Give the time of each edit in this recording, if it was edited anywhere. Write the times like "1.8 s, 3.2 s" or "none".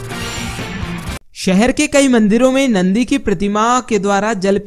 1.1 s

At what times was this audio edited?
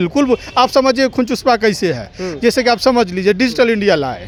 none

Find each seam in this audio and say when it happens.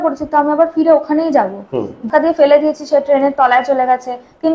2.1 s

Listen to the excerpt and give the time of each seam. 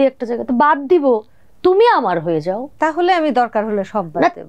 2.7 s

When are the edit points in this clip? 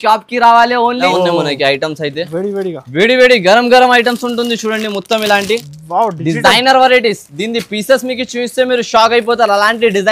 1.1 s

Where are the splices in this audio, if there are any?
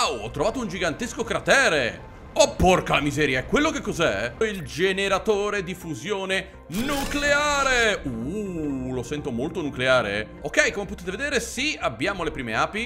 4.4 s, 10.4 s

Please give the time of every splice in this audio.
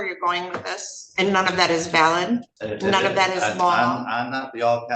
2.6 s

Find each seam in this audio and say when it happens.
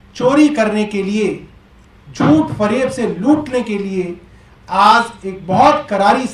none

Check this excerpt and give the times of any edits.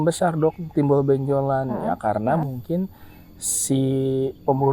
none

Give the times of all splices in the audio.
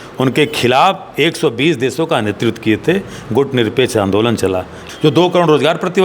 4.8 s

